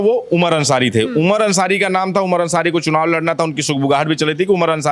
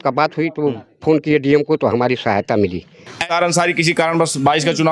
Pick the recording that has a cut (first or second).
second